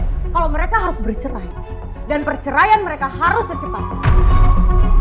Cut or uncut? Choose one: uncut